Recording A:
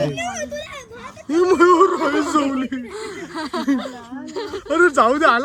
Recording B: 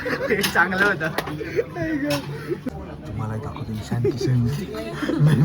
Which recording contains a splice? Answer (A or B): B